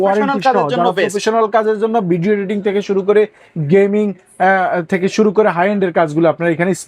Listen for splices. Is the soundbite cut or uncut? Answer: uncut